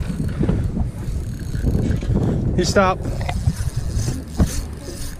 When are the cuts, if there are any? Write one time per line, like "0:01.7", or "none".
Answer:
none